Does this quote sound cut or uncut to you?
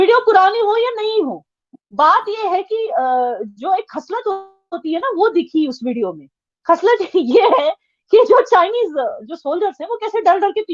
uncut